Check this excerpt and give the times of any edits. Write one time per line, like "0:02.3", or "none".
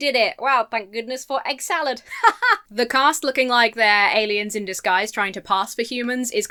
none